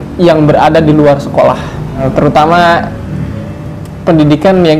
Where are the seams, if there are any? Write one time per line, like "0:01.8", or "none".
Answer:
0:02.1